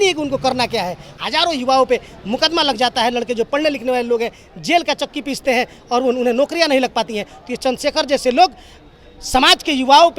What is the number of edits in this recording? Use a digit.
1